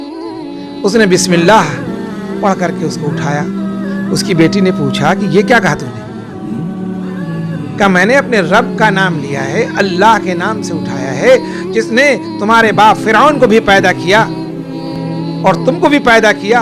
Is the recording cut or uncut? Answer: cut